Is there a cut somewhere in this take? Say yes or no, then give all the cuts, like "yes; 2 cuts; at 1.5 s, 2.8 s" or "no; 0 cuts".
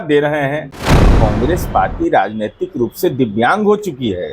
yes; 1 cut; at 0.9 s